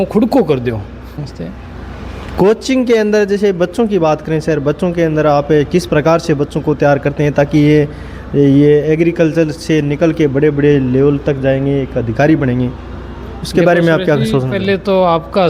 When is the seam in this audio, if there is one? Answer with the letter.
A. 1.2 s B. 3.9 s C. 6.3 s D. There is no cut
A